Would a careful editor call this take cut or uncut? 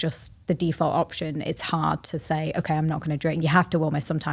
uncut